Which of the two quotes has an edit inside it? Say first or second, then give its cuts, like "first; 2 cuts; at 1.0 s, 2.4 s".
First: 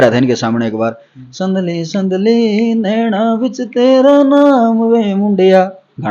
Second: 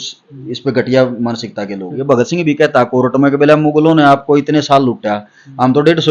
second; 1 cut; at 1.9 s